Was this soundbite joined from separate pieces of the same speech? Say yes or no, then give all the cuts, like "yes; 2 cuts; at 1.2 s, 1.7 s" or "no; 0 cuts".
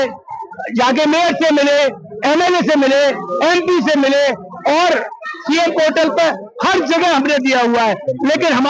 no; 0 cuts